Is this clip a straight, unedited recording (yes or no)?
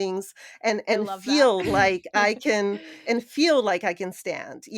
yes